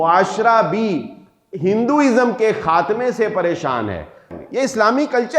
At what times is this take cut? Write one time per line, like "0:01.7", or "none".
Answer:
0:04.3